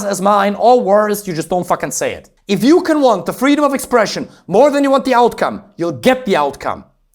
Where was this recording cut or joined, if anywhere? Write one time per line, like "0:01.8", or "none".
0:02.3